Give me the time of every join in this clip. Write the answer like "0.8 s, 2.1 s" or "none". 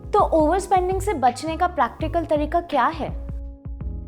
3.2 s